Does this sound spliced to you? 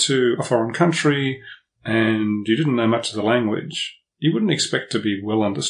no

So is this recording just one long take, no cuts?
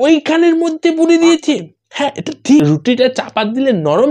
no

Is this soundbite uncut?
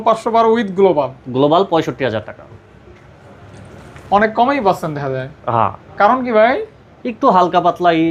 yes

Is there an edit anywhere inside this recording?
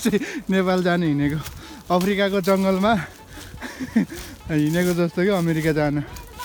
no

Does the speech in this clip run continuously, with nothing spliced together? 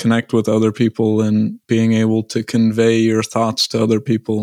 no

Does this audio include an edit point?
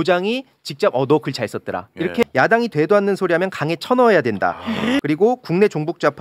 yes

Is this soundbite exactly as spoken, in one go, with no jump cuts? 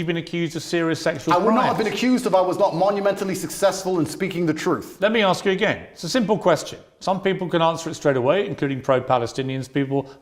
yes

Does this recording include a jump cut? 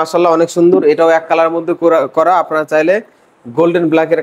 no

